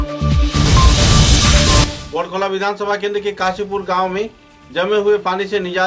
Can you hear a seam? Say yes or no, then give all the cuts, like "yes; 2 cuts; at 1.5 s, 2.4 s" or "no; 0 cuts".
yes; 1 cut; at 1.8 s